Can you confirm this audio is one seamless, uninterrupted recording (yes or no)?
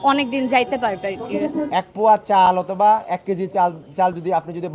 no